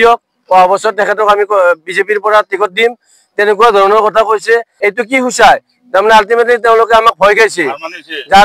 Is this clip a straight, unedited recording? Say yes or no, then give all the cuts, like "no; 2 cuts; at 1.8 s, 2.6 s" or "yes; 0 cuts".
no; 1 cut; at 4.7 s